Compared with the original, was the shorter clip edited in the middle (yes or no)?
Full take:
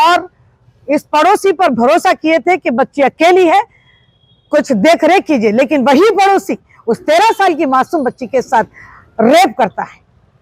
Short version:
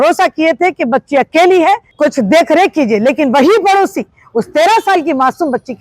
yes